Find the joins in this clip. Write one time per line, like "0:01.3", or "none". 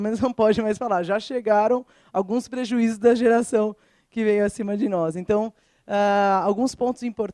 0:05.5